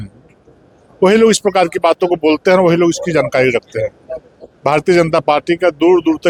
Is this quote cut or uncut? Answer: uncut